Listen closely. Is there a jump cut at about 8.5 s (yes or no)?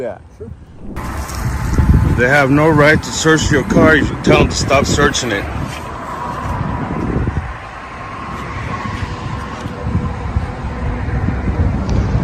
no